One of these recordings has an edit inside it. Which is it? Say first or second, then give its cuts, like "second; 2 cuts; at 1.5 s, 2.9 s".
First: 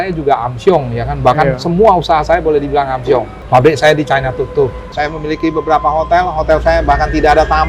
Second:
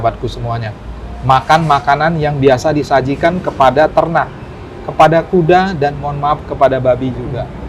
first; 2 cuts; at 3.4 s, 4.9 s